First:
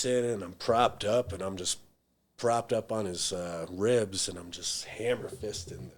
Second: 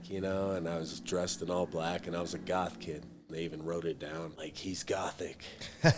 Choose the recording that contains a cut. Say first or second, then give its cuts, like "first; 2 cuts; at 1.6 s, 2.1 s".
second; 2 cuts; at 3.2 s, 4.3 s